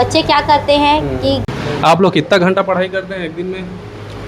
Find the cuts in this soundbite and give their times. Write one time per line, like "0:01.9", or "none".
0:01.5